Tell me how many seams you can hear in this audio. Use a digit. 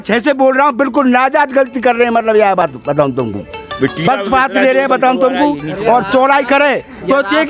0